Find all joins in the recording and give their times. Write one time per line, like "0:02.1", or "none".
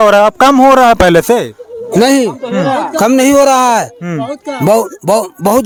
none

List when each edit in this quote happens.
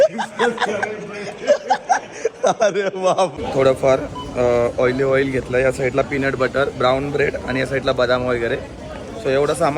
0:02.1
0:03.4

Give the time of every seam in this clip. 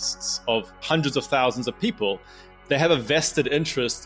0:00.8
0:02.5

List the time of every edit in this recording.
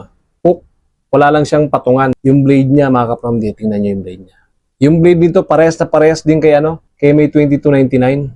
0:02.2

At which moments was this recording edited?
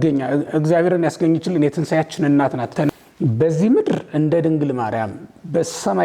0:03.0

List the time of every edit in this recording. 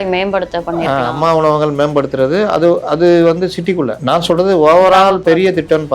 0:04.0

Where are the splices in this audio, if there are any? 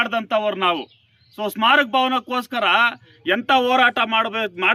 none

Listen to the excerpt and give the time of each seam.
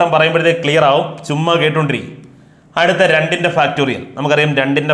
none

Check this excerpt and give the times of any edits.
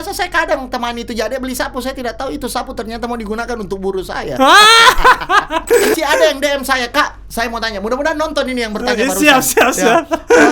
0:05.9

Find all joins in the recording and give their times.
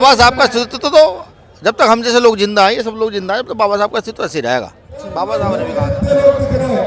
0:05.6

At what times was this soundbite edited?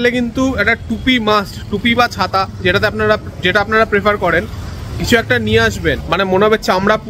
0:06.0

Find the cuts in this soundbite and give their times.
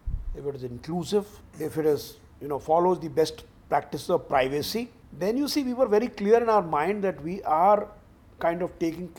0:01.4
0:05.0

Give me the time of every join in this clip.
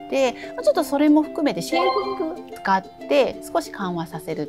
0:02.6

